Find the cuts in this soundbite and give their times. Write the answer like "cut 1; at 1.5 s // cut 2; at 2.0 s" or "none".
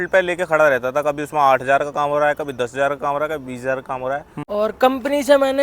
cut 1; at 4.4 s